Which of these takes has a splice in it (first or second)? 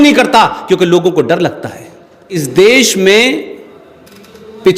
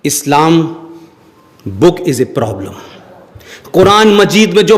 first